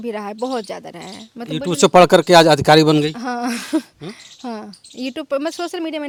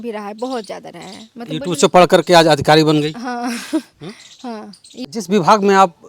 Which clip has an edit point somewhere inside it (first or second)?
second